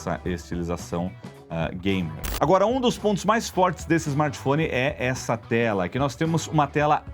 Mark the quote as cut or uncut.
cut